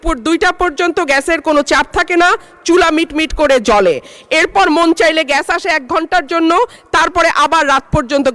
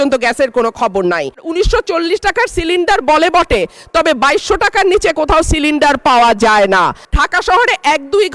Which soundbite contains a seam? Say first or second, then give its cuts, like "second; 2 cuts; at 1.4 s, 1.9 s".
second; 2 cuts; at 1.5 s, 7.1 s